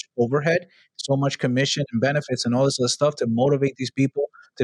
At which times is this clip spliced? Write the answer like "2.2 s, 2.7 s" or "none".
none